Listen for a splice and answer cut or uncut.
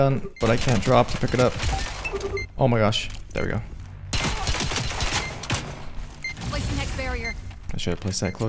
cut